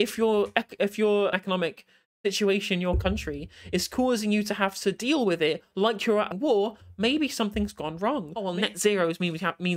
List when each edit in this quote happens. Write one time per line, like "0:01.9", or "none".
0:01.3
0:06.3
0:08.5